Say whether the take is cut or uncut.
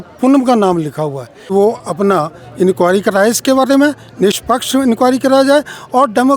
cut